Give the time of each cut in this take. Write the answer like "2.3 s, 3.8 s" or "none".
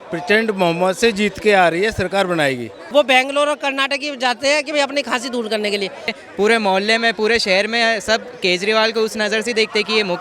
2.7 s, 6.2 s